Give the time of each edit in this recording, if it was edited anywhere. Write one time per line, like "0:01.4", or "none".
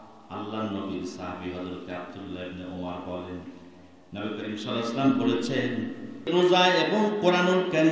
0:06.3